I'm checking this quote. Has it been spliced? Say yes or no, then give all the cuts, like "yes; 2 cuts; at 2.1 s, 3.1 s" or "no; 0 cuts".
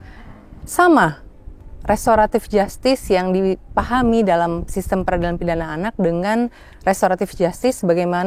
no; 0 cuts